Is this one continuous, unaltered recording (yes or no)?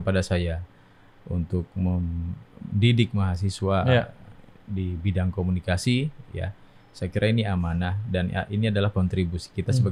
yes